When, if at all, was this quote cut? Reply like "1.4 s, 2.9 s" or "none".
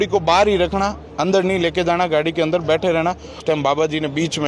3.4 s